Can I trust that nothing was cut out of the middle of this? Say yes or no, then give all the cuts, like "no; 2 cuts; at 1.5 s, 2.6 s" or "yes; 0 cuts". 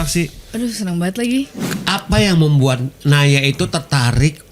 no; 1 cut; at 1.6 s